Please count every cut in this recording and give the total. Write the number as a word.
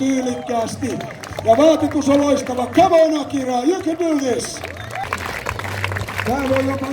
one